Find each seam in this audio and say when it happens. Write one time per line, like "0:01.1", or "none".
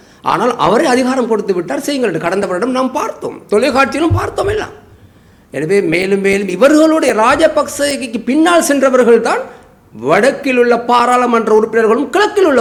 none

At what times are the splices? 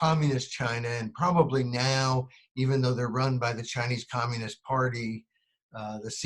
none

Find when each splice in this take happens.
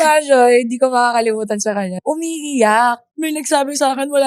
0:01.9
0:03.1

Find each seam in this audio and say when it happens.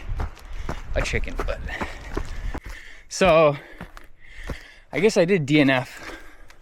0:02.7

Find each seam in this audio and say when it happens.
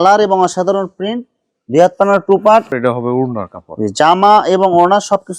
0:02.7

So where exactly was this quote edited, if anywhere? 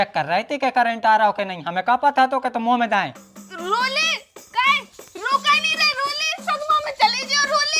0:03.3

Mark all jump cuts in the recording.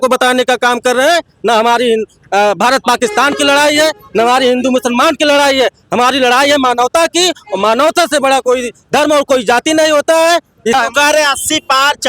0:10.7

